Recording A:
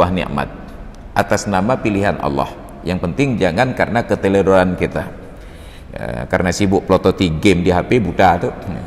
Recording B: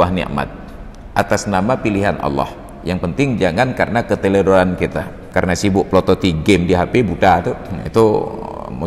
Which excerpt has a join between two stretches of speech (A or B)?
B